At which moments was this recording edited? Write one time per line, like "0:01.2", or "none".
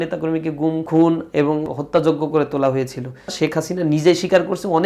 0:00.8
0:01.7
0:03.3

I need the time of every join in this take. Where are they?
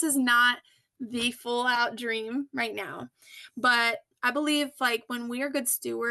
none

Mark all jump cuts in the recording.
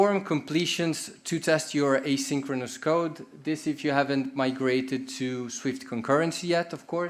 none

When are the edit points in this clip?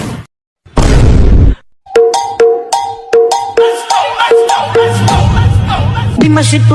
none

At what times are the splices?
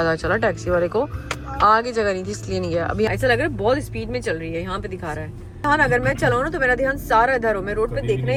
none

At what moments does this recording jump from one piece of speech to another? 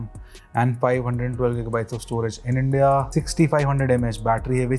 none

